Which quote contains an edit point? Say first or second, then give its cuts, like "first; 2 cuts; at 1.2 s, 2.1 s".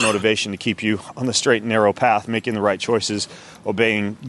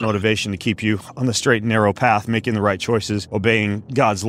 second; 1 cut; at 3.2 s